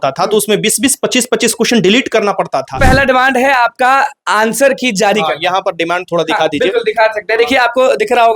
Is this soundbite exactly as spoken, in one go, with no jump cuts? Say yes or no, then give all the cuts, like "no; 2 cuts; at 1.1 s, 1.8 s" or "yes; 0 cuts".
no; 1 cut; at 2.8 s